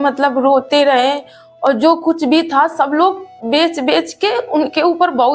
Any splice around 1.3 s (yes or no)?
no